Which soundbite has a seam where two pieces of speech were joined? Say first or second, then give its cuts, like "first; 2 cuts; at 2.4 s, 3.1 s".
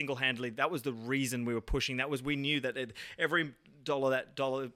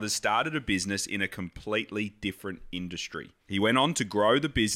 second; 1 cut; at 3.3 s